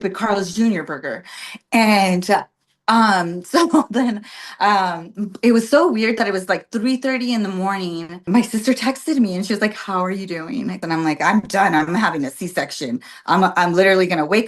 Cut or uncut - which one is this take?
cut